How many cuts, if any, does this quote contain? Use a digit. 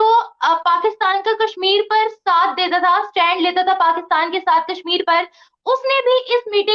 0